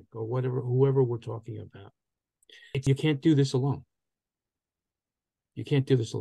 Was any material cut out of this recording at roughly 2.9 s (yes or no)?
yes